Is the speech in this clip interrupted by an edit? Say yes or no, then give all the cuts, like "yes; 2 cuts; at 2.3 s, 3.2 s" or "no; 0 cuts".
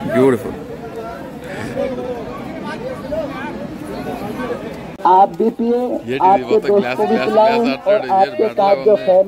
yes; 1 cut; at 4.9 s